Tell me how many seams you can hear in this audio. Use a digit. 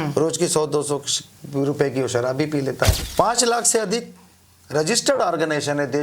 1